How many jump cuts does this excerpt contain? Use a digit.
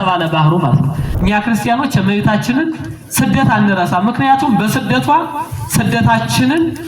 1